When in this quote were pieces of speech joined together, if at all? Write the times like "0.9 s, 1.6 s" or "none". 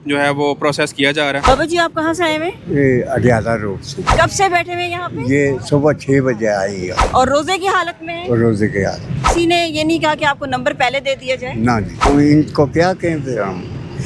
1.4 s, 4.0 s, 7.0 s, 9.2 s, 12.0 s